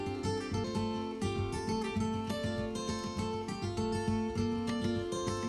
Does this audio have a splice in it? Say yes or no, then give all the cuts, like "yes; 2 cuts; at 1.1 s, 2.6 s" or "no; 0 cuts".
no; 0 cuts